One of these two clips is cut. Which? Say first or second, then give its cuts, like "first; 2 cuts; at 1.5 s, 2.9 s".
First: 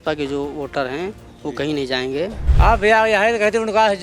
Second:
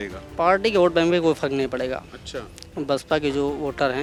first; 1 cut; at 2.4 s